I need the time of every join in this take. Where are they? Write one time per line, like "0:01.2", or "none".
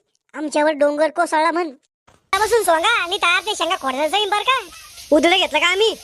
0:02.3